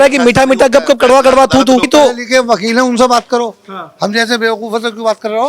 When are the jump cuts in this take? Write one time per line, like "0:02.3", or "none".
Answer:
0:01.8